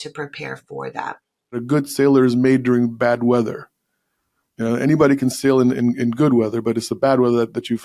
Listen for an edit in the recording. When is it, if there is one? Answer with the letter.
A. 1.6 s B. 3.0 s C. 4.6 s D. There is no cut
A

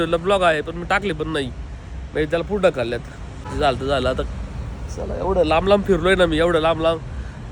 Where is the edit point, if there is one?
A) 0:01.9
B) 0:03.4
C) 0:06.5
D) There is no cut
B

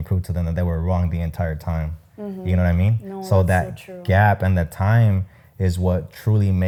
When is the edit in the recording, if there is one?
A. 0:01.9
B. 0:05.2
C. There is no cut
C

